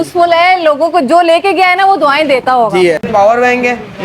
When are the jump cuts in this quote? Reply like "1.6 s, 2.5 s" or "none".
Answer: 3.1 s